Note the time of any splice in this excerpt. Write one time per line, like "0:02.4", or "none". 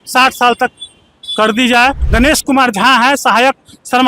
0:02.0